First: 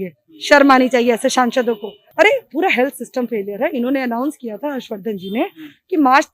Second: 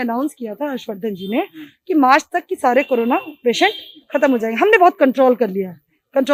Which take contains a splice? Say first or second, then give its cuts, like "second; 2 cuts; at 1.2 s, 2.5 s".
first; 1 cut; at 2.0 s